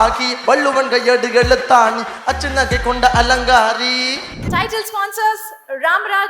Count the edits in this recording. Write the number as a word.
one